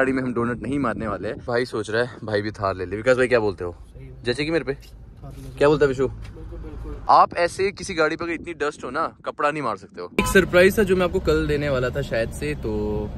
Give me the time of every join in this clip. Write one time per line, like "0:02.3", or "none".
0:01.4
0:06.9
0:10.2